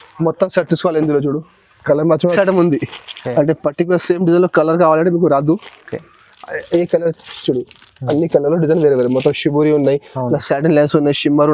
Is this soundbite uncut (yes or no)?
no